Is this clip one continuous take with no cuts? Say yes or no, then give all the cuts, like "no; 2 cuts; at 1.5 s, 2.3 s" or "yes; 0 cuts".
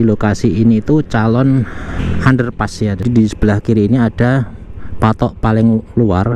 no; 2 cuts; at 2.0 s, 3.0 s